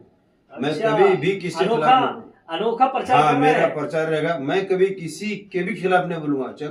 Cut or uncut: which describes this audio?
uncut